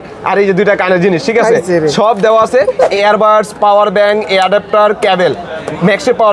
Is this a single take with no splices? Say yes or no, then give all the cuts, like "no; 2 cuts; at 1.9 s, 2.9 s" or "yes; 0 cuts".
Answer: no; 1 cut; at 2.9 s